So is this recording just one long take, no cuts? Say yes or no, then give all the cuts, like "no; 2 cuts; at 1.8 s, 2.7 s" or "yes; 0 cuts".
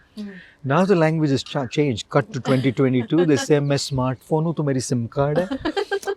yes; 0 cuts